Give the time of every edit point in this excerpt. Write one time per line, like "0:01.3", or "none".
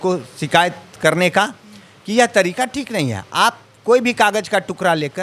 none